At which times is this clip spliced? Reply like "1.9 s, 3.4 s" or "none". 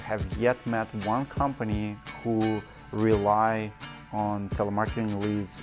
none

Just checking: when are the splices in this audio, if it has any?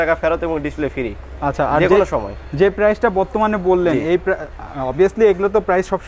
none

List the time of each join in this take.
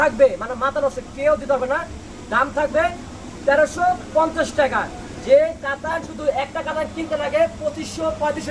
none

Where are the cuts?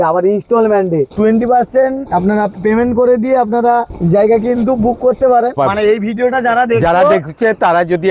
1.1 s, 2.0 s, 3.9 s, 5.5 s

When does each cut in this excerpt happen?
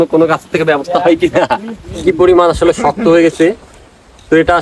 1.9 s

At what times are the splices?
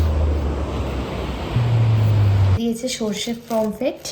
2.6 s

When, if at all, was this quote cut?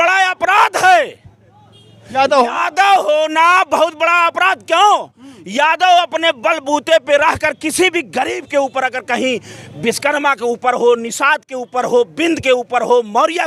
none

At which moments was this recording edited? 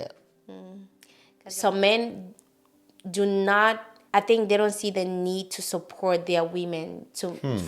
1.4 s, 3.9 s

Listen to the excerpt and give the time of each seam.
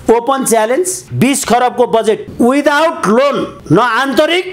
1.0 s, 2.3 s, 3.5 s

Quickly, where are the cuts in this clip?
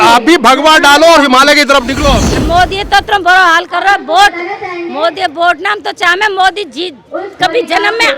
2.4 s

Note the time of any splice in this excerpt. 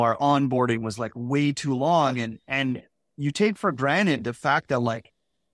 none

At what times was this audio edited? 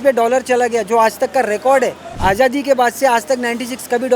2.1 s

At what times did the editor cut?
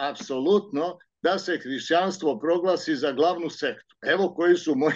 none

